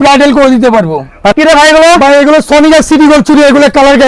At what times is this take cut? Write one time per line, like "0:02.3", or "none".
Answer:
0:01.3